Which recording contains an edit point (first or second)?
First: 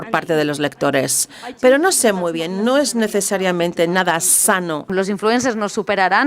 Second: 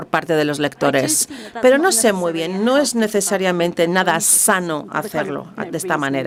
first